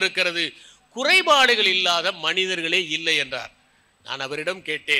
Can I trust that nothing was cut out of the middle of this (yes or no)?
yes